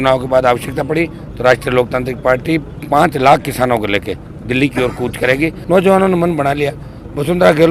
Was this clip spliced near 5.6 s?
yes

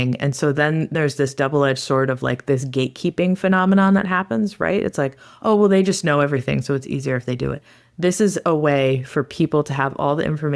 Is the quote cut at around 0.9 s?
yes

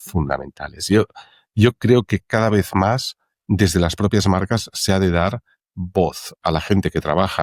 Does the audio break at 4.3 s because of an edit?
no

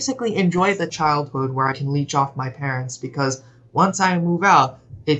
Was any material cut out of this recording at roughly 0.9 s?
yes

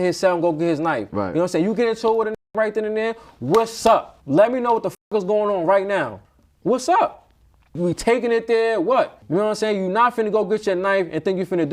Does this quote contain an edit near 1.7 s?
no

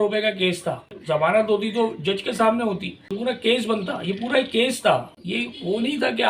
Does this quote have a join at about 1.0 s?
yes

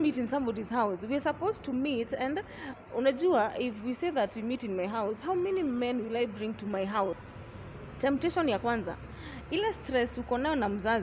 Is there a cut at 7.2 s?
yes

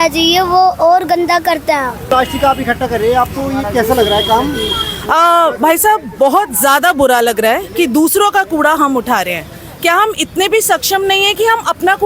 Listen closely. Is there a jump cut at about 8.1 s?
no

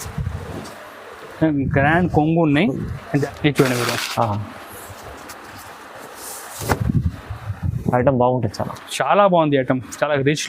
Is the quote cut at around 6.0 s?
no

